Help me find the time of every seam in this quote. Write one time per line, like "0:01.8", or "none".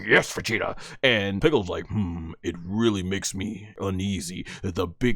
0:01.4
0:03.7

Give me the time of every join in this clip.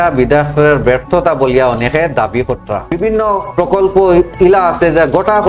0:02.9

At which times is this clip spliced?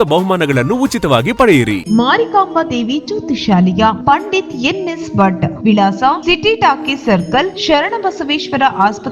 0:01.8

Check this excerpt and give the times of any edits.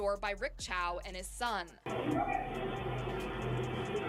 0:01.9

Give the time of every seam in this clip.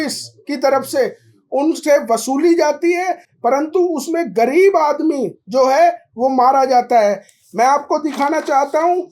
none

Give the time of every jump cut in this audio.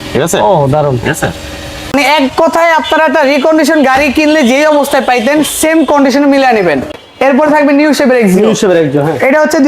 0:01.9
0:07.0

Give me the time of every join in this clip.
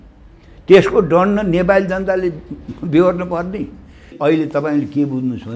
0:04.1

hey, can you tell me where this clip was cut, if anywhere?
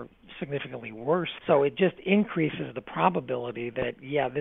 0:01.3

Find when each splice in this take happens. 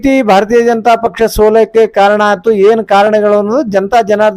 none

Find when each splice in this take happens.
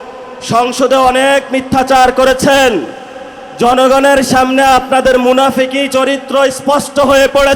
none

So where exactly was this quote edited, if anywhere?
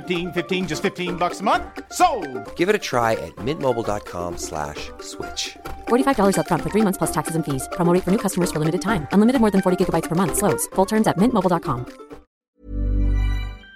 0:12.5

